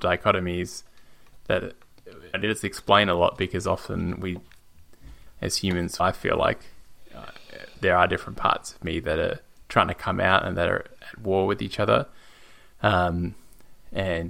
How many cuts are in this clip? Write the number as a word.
three